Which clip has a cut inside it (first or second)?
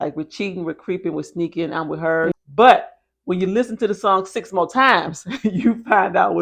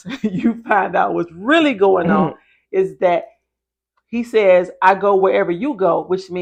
first